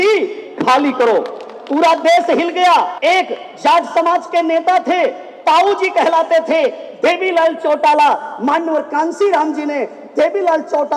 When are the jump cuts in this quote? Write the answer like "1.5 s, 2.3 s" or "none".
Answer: 2.9 s